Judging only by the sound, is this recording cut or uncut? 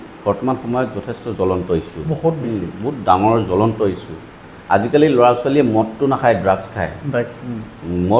uncut